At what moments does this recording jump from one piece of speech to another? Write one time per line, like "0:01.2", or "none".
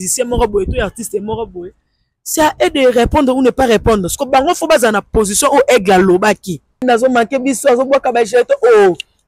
0:06.8